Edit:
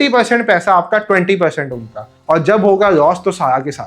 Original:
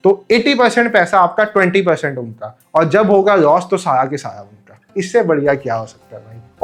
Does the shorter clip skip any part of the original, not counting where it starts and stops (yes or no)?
no